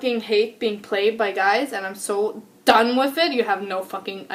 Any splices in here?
no; 0 cuts

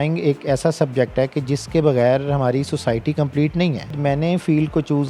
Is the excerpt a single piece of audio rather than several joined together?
no; 1 cut; at 3.9 s

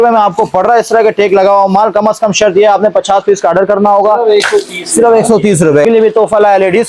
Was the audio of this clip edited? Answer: yes; 1 cut; at 5.8 s

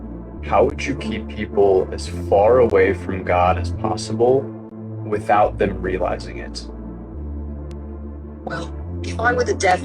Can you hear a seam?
no; 0 cuts

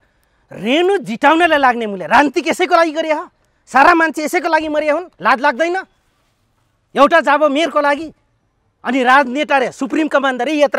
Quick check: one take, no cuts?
no; 1 cut; at 5.1 s

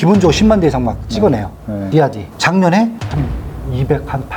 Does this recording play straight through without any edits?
no; 2 cuts; at 2.0 s, 3.0 s

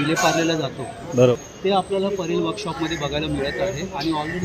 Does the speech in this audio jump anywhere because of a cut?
yes; 1 cut; at 1.3 s

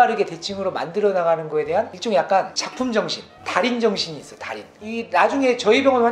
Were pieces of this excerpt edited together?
yes; 1 cut; at 4.8 s

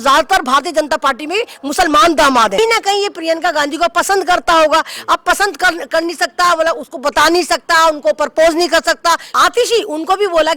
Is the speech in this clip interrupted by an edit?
yes; 2 cuts; at 2.6 s, 9.3 s

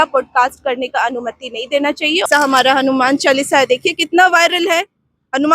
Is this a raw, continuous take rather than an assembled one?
no; 1 cut; at 2.2 s

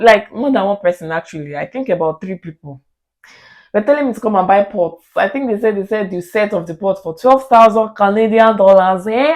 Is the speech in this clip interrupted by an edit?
no; 0 cuts

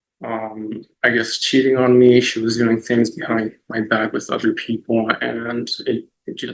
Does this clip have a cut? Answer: no; 0 cuts

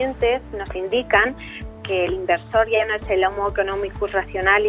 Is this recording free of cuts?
no; 1 cut; at 1.6 s

